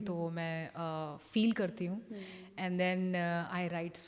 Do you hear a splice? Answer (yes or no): no